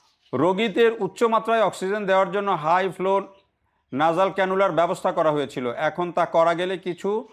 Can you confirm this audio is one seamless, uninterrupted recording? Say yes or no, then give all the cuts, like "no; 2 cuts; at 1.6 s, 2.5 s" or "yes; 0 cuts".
yes; 0 cuts